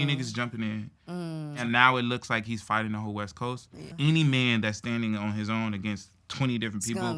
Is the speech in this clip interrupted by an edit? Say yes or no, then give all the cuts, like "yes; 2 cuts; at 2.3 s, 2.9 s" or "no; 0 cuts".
yes; 2 cuts; at 1.6 s, 3.9 s